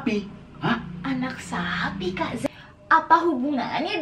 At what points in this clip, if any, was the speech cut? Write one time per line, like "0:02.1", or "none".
0:02.4